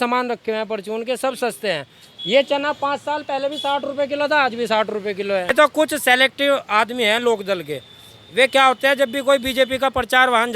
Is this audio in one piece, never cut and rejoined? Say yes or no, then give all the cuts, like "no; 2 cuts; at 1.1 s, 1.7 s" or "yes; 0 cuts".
no; 1 cut; at 5.5 s